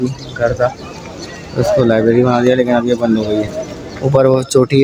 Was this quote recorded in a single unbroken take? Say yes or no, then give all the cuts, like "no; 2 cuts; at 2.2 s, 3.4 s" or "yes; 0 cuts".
yes; 0 cuts